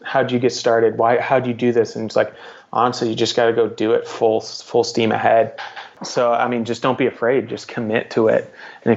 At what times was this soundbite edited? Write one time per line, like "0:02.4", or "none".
none